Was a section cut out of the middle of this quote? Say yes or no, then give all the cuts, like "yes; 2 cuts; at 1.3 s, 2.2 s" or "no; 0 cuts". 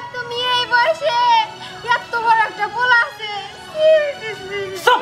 no; 0 cuts